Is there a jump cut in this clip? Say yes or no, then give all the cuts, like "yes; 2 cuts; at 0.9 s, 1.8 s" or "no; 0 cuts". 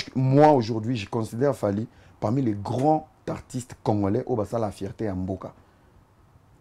no; 0 cuts